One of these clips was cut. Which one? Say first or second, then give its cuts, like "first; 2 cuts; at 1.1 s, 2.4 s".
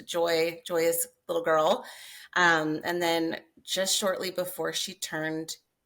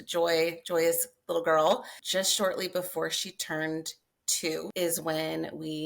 second; 2 cuts; at 2.0 s, 4.7 s